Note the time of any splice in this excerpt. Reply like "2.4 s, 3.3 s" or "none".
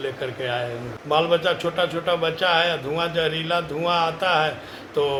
none